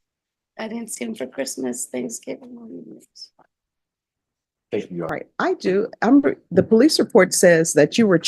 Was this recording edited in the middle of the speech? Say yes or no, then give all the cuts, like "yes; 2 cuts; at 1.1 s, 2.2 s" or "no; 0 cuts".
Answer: yes; 1 cut; at 5.1 s